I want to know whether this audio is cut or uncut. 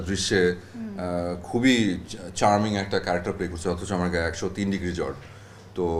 uncut